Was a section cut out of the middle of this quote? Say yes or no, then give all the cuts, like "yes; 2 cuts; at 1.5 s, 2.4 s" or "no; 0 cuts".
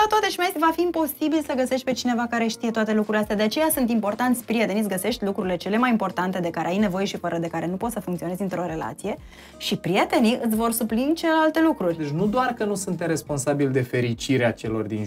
yes; 1 cut; at 12.1 s